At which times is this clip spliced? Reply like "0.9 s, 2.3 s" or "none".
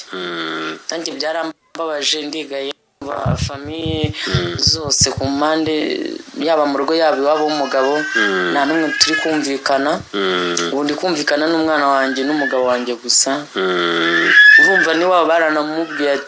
none